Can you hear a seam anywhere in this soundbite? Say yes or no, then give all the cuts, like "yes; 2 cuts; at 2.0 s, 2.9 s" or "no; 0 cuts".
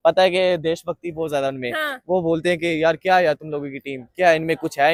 no; 0 cuts